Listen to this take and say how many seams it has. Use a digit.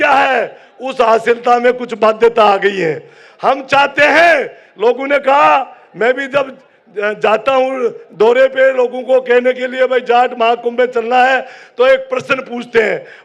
0